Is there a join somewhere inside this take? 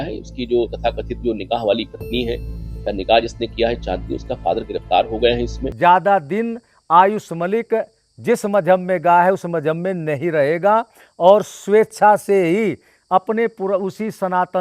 yes; 1 cut; at 5.6 s

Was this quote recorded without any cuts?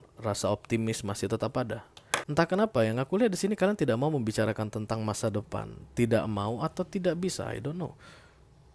no; 1 cut; at 2.2 s

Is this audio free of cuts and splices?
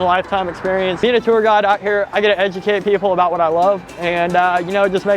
no; 1 cut; at 1.0 s

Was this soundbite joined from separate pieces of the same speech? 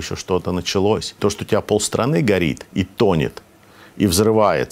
yes; 1 cut; at 1.1 s

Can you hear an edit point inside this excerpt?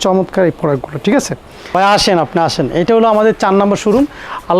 yes; 1 cut; at 1.5 s

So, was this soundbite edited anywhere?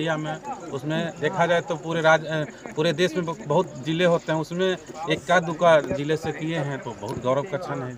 no; 0 cuts

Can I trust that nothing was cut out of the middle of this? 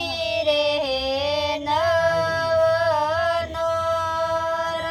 yes; 0 cuts

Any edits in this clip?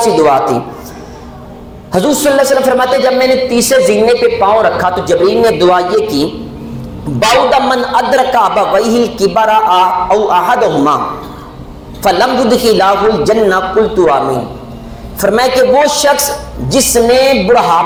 no; 0 cuts

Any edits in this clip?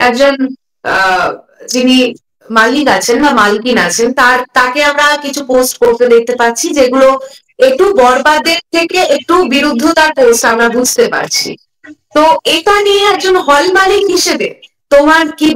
no; 0 cuts

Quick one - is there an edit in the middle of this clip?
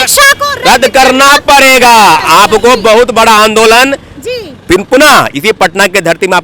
yes; 1 cut; at 2.2 s

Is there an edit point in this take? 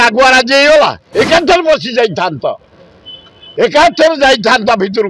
yes; 1 cut; at 1.0 s

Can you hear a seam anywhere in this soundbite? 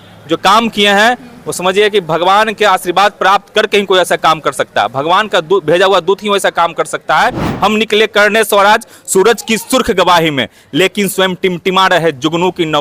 yes; 1 cut; at 7.4 s

